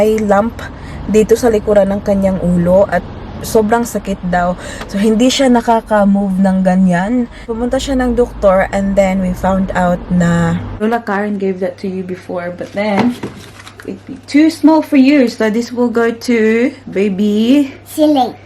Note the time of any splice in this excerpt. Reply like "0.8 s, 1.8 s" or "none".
7.5 s, 10.8 s